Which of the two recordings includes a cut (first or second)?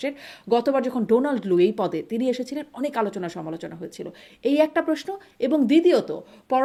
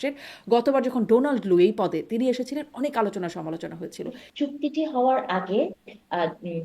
second